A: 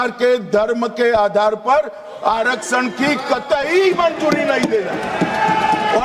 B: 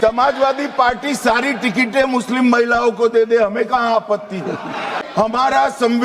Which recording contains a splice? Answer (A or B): B